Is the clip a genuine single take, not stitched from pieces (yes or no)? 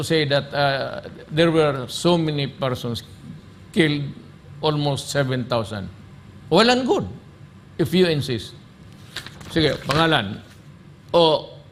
yes